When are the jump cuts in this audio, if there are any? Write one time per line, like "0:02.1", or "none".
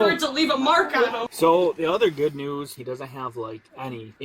0:01.2
0:02.8